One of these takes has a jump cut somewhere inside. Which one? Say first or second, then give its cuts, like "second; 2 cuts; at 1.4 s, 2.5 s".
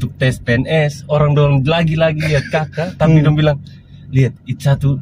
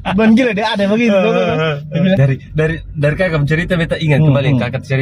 second; 1 cut; at 2.2 s